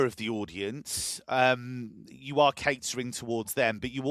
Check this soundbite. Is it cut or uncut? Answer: uncut